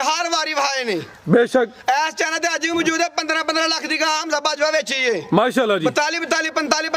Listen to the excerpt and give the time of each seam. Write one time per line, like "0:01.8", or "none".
none